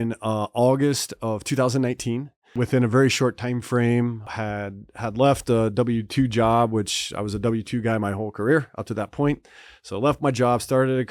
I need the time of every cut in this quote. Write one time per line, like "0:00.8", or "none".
0:02.6
0:04.3